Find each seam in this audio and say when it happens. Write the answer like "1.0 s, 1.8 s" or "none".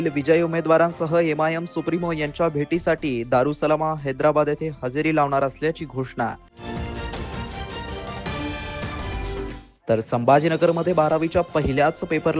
none